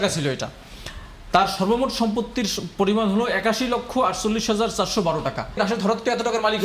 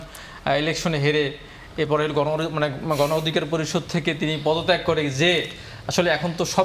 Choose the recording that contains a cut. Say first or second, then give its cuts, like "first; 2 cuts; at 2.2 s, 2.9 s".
first; 1 cut; at 5.6 s